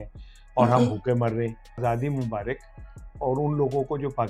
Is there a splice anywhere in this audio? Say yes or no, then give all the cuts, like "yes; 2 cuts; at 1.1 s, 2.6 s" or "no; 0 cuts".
yes; 1 cut; at 1.8 s